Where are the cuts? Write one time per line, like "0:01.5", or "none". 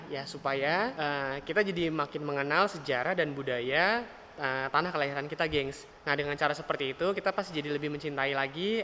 0:00.9
0:05.9